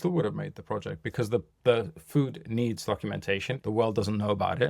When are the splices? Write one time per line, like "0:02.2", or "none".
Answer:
0:03.6